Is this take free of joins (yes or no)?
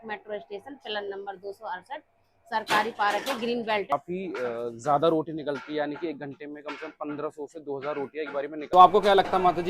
no